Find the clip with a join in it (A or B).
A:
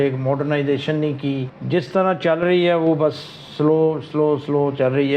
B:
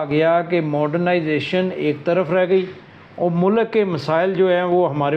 A